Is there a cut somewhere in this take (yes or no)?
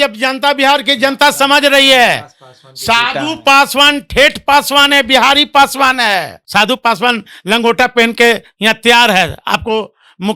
yes